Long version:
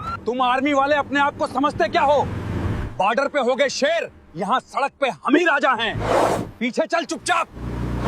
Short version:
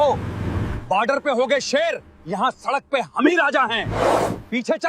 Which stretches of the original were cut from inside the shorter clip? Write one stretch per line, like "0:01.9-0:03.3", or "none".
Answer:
none

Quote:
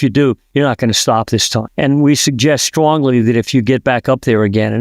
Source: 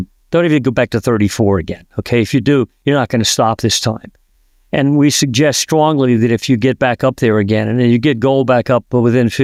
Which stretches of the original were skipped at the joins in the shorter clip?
0:04.0-0:04.6

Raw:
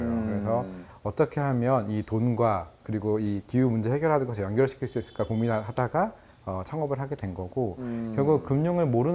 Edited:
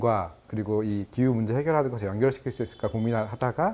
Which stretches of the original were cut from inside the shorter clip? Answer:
none

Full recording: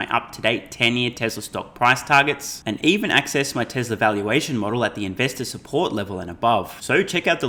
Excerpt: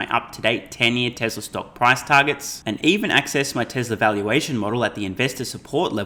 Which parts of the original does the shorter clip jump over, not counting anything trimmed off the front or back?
none

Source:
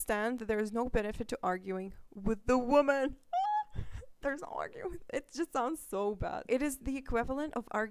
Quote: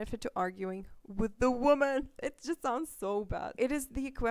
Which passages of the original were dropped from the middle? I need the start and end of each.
0:03.2-0:05.0

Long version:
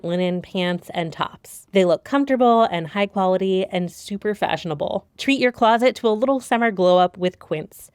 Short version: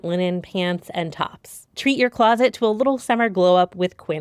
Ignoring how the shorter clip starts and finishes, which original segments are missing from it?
0:01.6-0:05.1

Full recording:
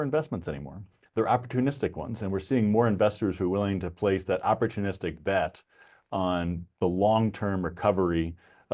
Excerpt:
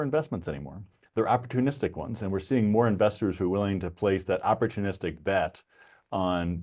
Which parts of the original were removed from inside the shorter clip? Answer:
none

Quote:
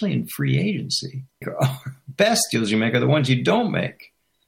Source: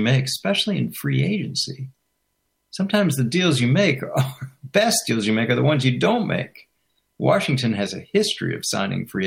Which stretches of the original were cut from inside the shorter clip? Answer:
0:02.1-0:04.0

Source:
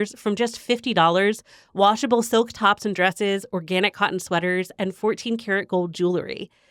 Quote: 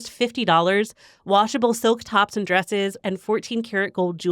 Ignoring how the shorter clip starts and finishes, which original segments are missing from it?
0:03.5-0:04.7

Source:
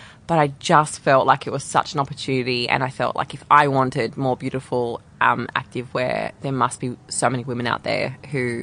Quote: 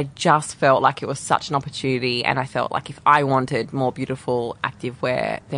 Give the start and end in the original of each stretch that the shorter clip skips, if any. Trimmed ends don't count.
0:05.1-0:05.5

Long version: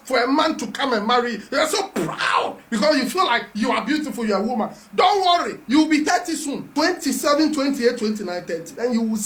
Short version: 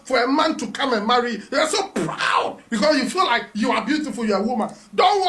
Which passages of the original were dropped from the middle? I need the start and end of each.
none

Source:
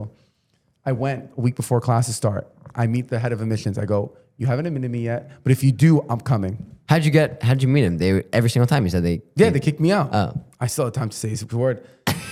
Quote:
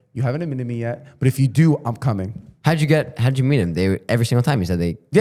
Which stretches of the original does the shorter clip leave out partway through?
none

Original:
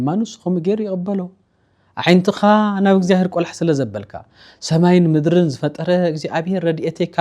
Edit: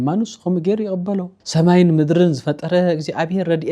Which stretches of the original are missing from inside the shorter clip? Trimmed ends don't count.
0:01.4-0:04.5

